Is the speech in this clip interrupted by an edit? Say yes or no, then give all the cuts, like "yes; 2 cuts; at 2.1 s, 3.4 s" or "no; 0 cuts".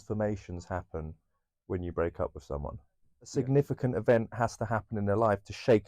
yes; 1 cut; at 3.3 s